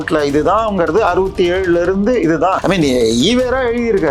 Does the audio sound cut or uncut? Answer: cut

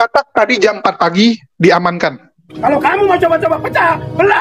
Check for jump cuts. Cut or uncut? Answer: cut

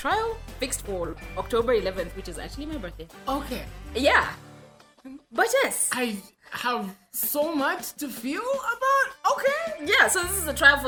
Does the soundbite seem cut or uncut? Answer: uncut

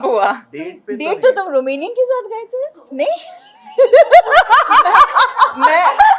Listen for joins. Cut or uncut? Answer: uncut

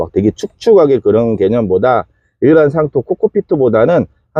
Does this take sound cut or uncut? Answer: uncut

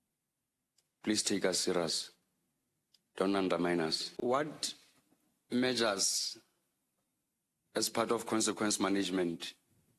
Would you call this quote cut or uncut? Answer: cut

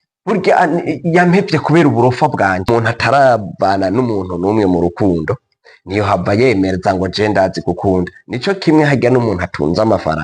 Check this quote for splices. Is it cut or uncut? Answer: cut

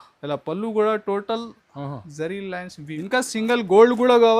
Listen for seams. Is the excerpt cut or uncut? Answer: cut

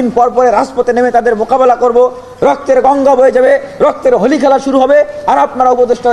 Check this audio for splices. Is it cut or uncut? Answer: uncut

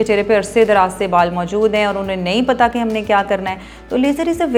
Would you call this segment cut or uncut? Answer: uncut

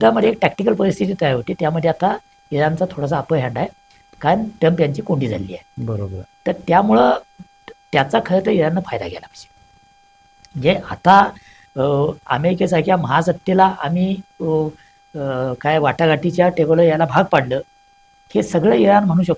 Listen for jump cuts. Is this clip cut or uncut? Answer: uncut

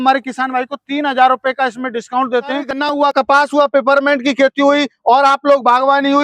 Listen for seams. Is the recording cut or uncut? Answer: cut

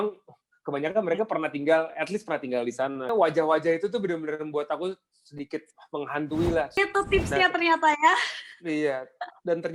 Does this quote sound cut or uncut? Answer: cut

